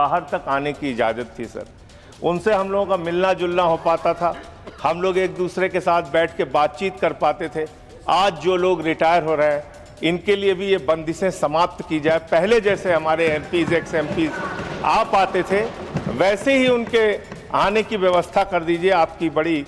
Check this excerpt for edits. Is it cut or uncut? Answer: uncut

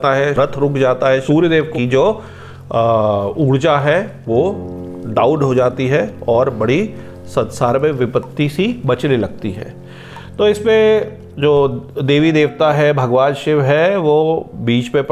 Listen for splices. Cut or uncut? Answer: uncut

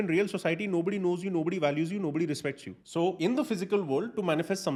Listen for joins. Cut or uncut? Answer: uncut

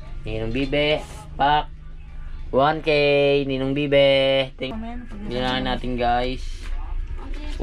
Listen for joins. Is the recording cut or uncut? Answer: cut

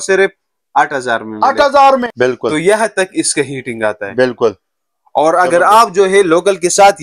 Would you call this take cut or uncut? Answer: cut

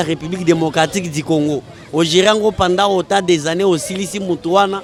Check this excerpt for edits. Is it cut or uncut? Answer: uncut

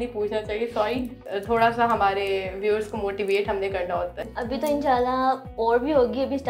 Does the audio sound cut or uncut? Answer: cut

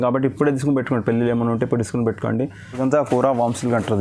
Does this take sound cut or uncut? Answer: cut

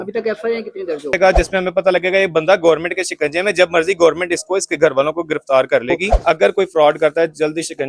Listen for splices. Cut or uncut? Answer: cut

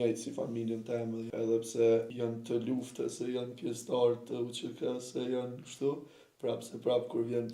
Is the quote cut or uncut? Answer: cut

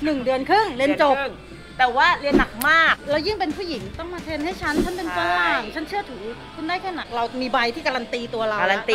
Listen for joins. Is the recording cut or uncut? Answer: cut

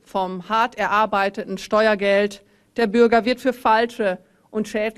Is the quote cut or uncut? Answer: uncut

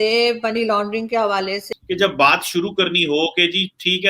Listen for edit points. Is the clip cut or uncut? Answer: cut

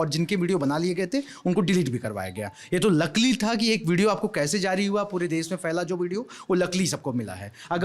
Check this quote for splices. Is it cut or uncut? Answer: uncut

